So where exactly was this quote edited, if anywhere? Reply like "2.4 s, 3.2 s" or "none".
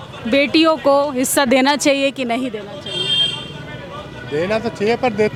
none